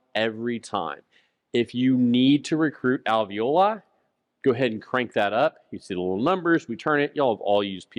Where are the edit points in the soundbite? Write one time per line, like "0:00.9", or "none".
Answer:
none